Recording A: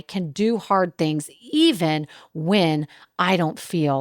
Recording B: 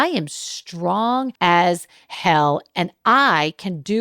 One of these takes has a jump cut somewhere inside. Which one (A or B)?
B